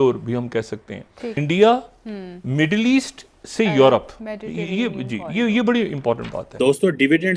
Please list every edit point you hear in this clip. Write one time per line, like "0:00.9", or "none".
0:01.3
0:06.5